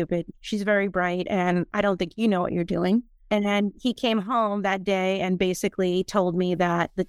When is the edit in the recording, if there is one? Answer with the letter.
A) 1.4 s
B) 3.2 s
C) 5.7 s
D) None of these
B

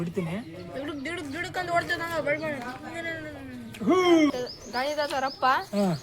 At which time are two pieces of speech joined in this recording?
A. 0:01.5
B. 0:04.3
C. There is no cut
B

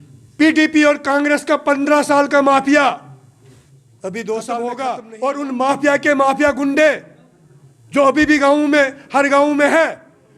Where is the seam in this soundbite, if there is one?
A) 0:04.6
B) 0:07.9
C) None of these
A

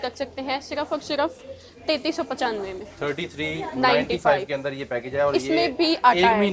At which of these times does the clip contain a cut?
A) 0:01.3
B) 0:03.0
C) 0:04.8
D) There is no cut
D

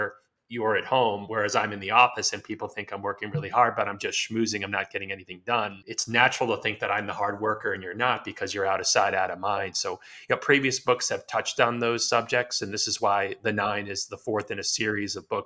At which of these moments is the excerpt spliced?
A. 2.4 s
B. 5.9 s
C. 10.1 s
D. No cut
B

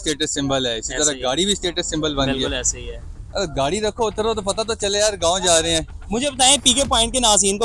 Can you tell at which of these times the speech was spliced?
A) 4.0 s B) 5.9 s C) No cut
B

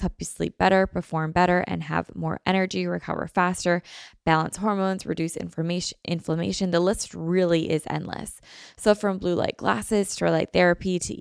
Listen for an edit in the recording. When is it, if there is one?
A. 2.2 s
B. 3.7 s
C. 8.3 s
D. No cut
D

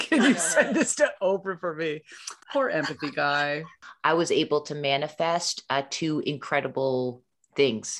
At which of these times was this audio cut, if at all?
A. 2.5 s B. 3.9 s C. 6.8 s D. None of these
B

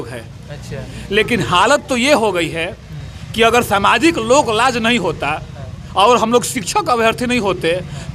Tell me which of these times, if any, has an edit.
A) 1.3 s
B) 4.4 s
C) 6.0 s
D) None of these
D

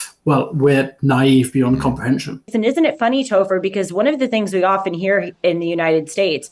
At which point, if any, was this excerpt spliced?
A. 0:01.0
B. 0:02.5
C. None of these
B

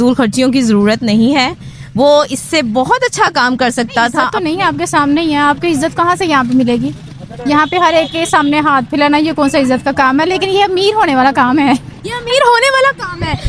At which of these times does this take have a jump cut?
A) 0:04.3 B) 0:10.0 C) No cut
A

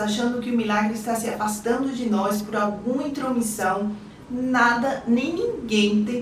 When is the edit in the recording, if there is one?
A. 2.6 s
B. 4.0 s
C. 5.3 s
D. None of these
B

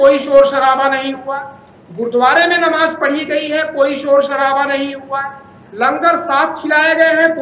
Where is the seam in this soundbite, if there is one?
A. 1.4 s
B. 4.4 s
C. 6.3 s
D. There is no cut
D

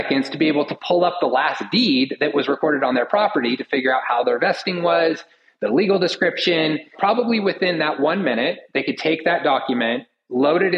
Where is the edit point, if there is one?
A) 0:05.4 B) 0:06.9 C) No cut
B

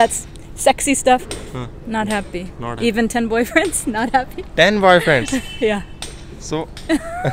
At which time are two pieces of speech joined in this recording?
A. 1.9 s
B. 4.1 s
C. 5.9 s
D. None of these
D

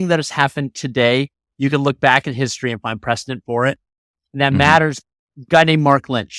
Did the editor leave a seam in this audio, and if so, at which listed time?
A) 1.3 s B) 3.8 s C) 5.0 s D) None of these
C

